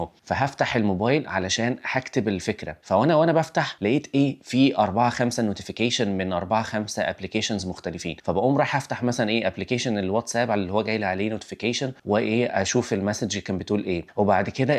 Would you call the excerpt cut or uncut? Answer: uncut